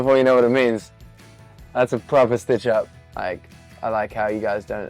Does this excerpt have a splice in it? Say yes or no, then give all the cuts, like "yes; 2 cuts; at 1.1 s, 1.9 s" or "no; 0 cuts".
yes; 1 cut; at 3.0 s